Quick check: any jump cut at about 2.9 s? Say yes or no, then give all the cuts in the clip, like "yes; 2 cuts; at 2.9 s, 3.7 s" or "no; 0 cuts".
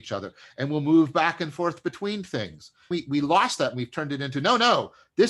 yes; 1 cut; at 2.9 s